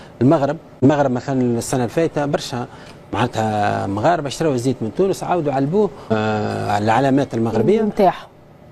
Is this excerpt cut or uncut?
cut